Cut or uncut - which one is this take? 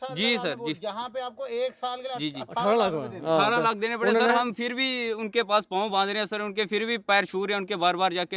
uncut